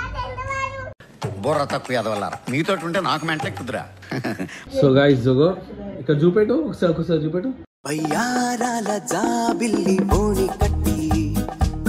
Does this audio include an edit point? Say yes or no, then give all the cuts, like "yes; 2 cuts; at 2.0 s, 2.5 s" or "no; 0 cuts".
yes; 2 cuts; at 0.9 s, 4.5 s